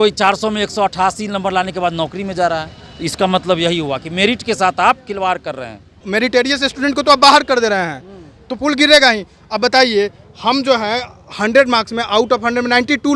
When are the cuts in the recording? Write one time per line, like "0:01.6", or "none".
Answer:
0:06.0